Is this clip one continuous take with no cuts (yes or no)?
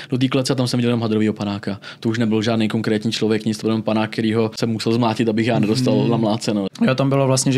no